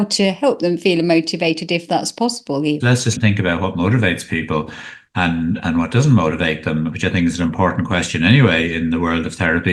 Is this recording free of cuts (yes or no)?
no